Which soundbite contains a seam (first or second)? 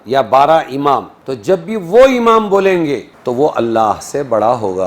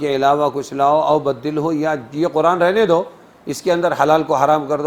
first